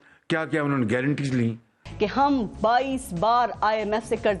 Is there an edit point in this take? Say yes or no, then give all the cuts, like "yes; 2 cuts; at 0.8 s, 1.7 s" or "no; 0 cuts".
yes; 1 cut; at 1.8 s